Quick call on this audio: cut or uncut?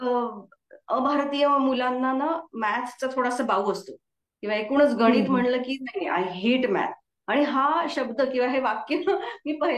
uncut